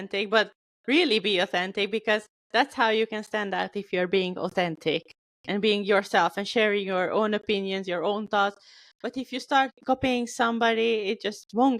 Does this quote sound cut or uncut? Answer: uncut